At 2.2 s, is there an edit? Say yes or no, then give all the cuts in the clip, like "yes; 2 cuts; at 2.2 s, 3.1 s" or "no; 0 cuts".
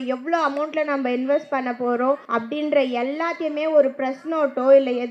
yes; 1 cut; at 2.2 s